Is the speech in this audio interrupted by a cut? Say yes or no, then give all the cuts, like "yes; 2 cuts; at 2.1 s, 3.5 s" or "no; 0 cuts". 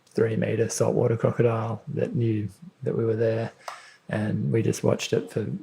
no; 0 cuts